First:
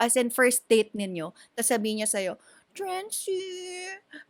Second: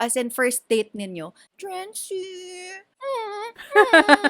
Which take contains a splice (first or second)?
second